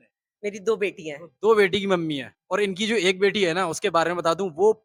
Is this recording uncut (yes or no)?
yes